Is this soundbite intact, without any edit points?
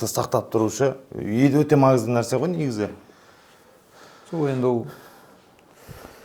yes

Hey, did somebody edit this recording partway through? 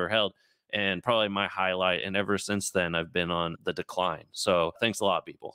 no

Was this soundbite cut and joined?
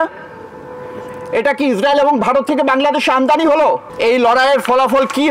yes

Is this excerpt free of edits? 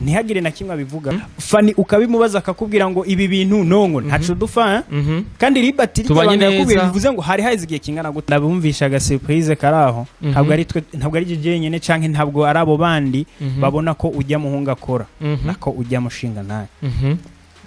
no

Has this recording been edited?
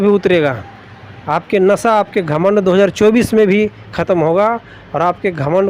no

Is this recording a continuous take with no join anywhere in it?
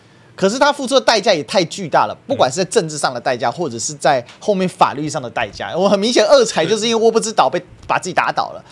yes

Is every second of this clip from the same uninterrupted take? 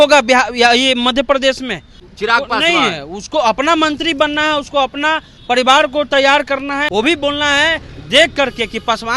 no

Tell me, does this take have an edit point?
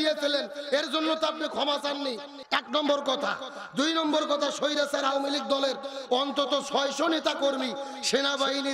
no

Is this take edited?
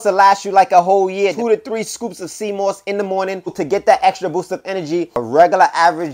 yes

